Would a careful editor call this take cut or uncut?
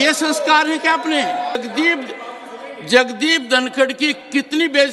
cut